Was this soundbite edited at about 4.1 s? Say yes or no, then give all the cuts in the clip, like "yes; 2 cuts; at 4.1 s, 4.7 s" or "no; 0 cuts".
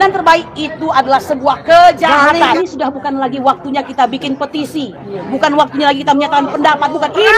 no; 1 cut; at 2.6 s